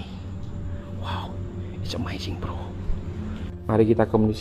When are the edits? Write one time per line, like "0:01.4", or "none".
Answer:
0:03.5